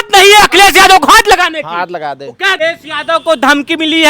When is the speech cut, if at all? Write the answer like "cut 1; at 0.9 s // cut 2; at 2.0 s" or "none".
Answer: cut 1; at 2.6 s